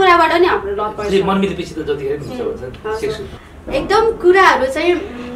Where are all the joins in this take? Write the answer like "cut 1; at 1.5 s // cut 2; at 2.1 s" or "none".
cut 1; at 3.3 s

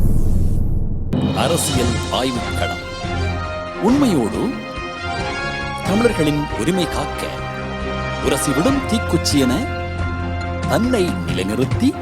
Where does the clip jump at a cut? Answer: cut 1; at 1.1 s

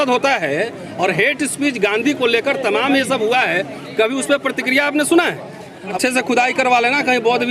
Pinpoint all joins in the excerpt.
cut 1; at 5.9 s

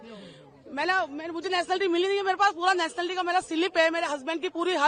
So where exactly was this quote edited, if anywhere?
none

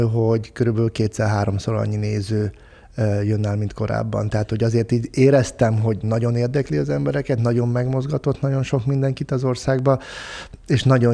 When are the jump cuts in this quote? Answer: none

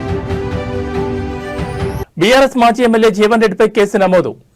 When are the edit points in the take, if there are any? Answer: cut 1; at 1.6 s

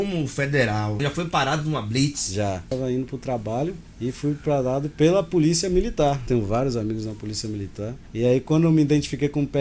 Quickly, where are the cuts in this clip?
cut 1; at 1.0 s // cut 2; at 2.7 s // cut 3; at 3.9 s // cut 4; at 6.2 s // cut 5; at 8.0 s

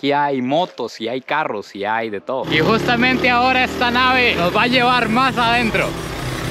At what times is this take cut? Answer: none

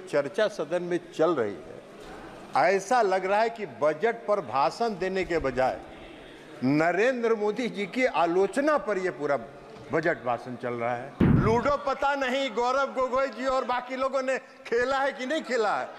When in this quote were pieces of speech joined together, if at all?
cut 1; at 11.3 s

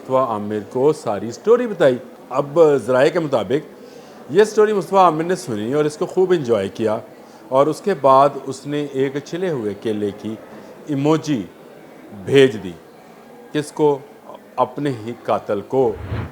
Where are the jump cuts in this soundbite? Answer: cut 1; at 2.1 s

